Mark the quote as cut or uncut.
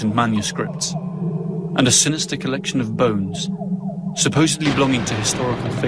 cut